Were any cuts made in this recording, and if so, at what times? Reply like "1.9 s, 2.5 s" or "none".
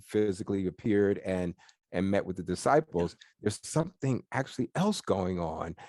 none